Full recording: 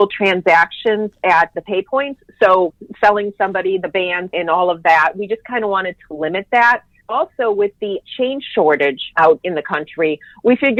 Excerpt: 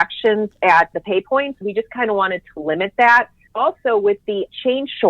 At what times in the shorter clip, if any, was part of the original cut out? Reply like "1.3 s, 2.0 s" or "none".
1.6 s

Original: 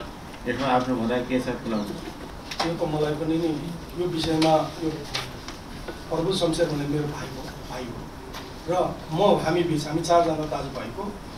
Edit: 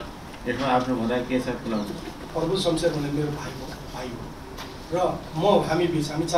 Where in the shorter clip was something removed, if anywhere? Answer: 2.2 s

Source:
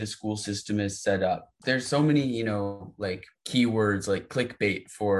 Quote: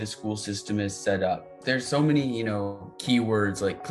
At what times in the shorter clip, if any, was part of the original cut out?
2.9 s

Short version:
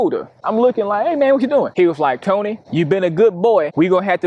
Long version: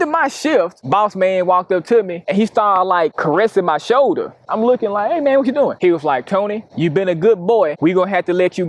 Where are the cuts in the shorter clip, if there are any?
none

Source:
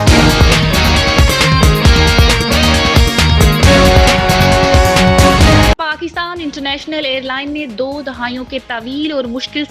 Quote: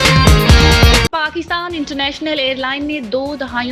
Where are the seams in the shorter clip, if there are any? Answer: 1.1 s

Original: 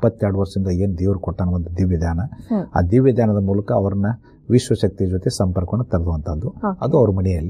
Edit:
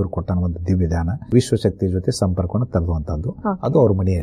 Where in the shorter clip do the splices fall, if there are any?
1.1 s

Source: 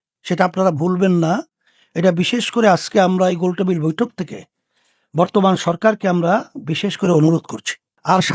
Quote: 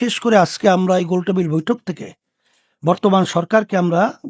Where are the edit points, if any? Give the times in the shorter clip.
none

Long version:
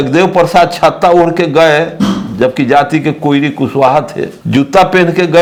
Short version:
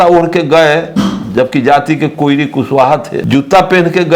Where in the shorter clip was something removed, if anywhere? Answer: 3.2 s

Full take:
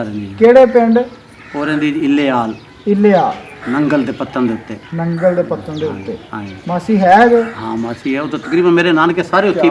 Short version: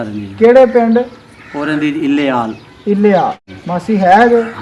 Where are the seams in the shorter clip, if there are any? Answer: 3.5 s

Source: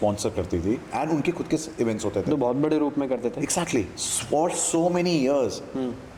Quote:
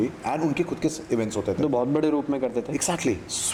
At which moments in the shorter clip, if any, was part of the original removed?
none

